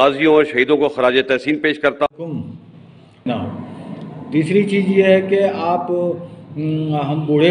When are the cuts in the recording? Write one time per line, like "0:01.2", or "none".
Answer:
0:03.3